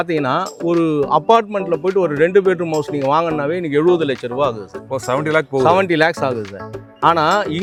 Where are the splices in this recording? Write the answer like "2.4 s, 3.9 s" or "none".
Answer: none